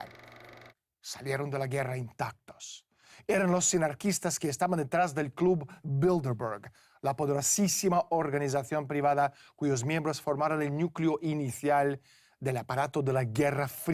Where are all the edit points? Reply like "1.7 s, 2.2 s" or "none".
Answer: none